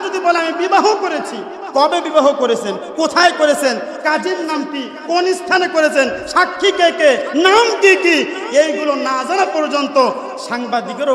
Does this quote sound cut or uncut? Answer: uncut